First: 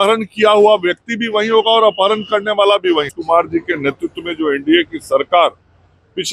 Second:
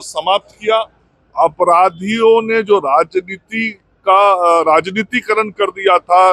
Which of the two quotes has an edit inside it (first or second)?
first